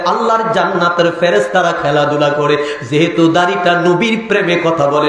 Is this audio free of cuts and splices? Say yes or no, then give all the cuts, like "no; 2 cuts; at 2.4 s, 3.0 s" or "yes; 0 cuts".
yes; 0 cuts